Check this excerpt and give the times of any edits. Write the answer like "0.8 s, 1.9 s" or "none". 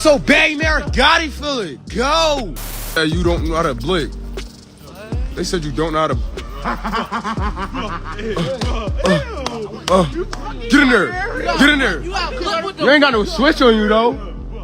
3.0 s